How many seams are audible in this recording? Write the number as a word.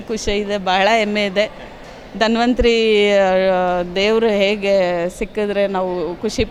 zero